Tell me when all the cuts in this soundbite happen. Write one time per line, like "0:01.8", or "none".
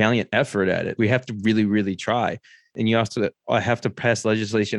0:00.9
0:02.6

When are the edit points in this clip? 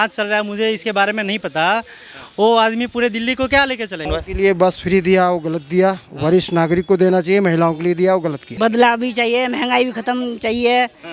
0:04.1
0:08.5

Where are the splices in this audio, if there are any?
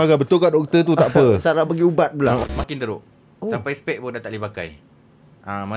0:02.4

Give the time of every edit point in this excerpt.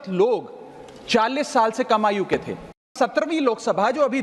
0:02.9

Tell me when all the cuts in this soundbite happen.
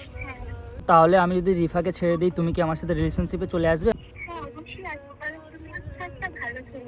0:00.8
0:03.9

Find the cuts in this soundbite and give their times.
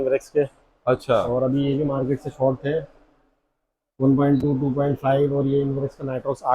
none

